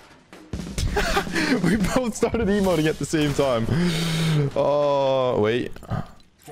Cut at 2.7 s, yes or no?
no